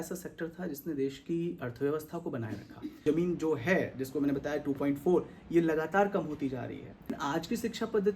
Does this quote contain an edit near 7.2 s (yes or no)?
yes